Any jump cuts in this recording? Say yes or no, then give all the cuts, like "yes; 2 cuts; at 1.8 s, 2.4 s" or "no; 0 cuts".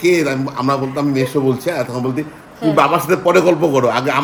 no; 0 cuts